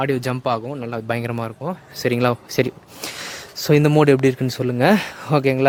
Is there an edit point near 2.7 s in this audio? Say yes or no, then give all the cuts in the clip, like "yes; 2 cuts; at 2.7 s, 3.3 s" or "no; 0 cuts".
no; 0 cuts